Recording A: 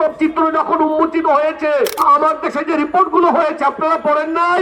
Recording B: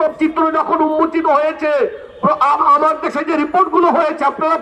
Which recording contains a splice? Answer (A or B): A